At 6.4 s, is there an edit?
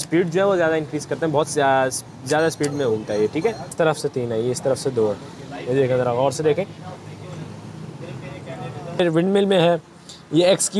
no; 2 cuts; at 3.7 s, 9.0 s

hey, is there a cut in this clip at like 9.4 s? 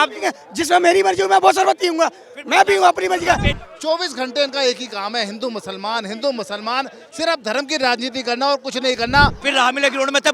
yes; 2 cuts; at 3.5 s, 9.4 s

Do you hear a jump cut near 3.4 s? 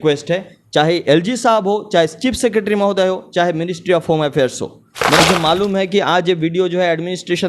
no; 1 cut; at 5.2 s

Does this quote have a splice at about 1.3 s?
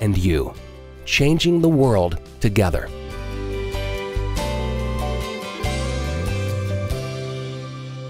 no; 1 cut; at 3.0 s

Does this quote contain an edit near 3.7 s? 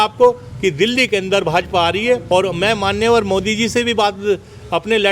no; 1 cut; at 2.2 s

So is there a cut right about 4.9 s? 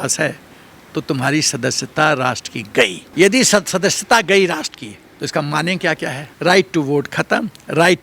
no; 2 cuts; at 3.0 s, 6.2 s

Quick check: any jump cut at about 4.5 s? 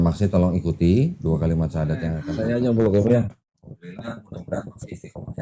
no; 1 cut; at 2.3 s

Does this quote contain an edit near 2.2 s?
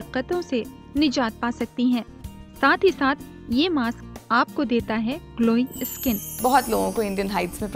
no; 1 cut; at 6.3 s

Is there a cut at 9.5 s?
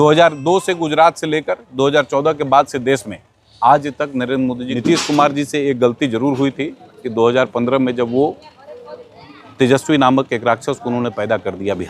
no; 1 cut; at 4.7 s

